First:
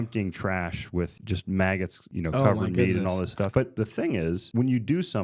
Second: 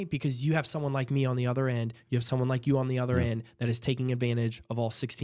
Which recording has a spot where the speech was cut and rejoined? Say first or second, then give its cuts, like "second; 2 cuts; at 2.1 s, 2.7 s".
first; 4 cuts; at 1.1 s, 2.0 s, 3.5 s, 4.4 s